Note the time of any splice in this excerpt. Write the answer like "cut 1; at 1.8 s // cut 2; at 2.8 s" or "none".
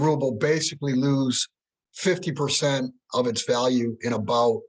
none